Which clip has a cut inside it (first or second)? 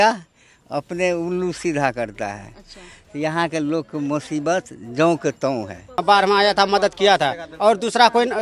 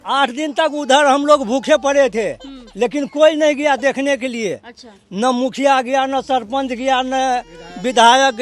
first